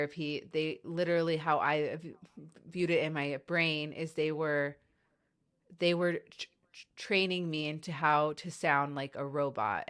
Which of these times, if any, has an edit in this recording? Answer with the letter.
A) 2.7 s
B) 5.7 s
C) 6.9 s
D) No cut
D